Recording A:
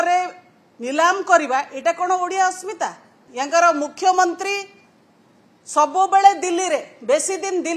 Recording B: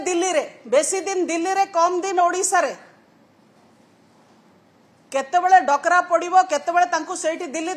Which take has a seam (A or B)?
A